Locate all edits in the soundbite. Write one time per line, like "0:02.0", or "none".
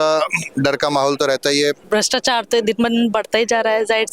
0:01.8